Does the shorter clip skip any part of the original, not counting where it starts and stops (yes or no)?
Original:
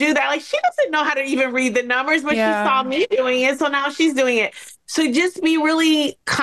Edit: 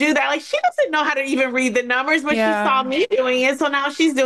no